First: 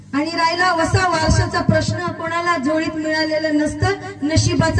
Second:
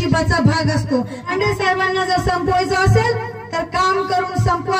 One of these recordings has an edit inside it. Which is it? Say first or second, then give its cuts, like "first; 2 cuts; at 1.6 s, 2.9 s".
second; 1 cut; at 1.3 s